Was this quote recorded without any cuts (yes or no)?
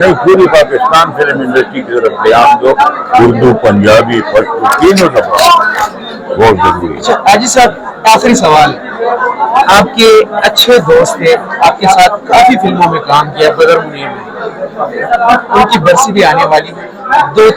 yes